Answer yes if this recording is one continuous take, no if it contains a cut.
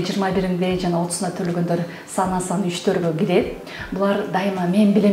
yes